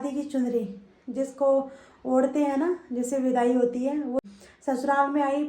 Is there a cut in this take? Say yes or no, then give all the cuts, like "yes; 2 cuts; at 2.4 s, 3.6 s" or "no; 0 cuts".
yes; 1 cut; at 4.2 s